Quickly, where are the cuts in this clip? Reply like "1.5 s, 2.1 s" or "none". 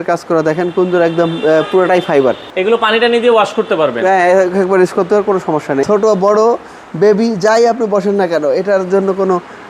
2.5 s, 5.8 s